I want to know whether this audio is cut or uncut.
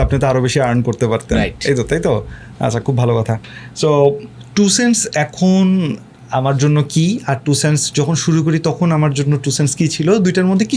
uncut